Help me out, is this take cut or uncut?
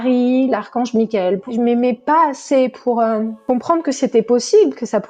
cut